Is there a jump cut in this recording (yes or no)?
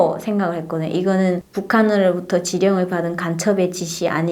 no